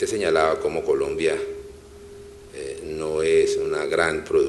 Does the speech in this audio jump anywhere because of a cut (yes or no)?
yes